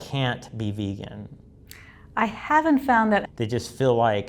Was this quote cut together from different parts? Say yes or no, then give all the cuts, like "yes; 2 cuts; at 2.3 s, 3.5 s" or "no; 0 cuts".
yes; 1 cut; at 3.2 s